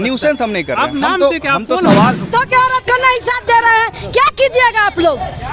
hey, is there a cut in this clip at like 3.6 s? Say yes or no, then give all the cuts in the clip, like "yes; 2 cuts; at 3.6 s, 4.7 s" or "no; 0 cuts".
no; 1 cut; at 2.3 s